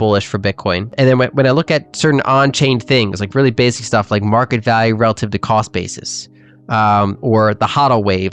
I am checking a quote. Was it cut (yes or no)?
yes